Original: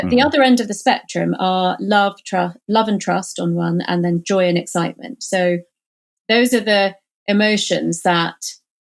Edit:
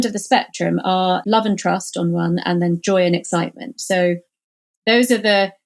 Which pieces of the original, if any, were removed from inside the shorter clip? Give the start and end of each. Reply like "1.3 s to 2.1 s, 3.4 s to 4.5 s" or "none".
1.8 s to 2.6 s